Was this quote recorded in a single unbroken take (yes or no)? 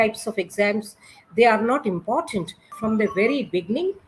no